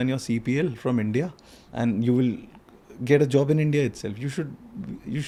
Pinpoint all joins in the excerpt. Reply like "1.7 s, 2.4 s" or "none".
none

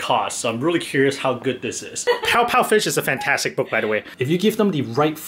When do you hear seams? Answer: 2.1 s, 4.1 s

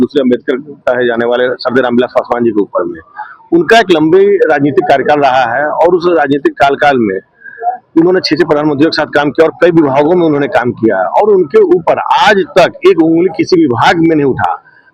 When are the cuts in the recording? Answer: none

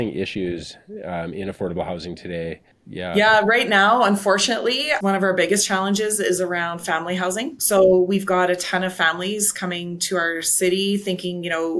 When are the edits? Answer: 5.0 s, 7.6 s

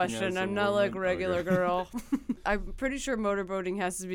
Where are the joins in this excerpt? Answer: 2.4 s

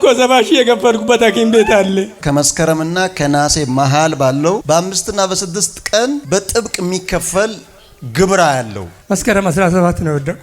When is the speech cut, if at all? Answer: 2.2 s, 4.6 s, 6.2 s

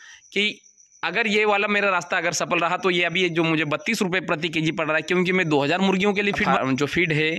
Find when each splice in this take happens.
6.4 s

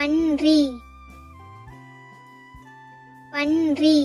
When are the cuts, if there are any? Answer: none

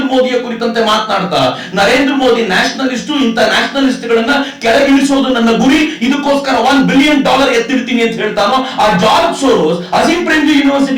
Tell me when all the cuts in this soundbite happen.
none

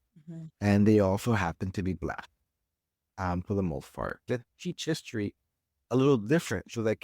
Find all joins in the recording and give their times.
4.2 s

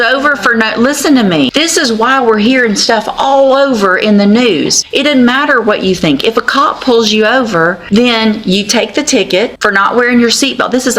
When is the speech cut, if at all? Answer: 1.5 s, 4.8 s, 7.8 s, 9.6 s

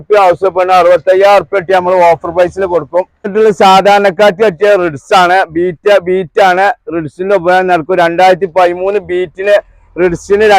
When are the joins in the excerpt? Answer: 3.3 s

